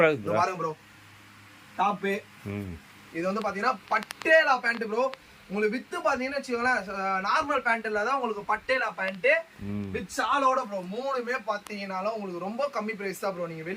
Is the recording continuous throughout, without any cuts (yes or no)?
yes